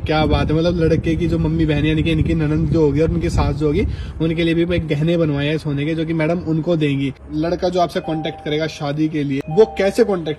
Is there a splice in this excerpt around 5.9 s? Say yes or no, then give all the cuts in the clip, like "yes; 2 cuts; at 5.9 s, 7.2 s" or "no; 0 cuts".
no; 2 cuts; at 7.2 s, 9.4 s